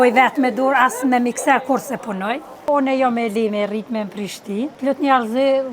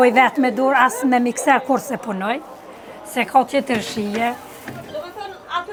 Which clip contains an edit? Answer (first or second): first